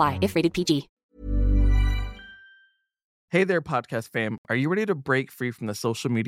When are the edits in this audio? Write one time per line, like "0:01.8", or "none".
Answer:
none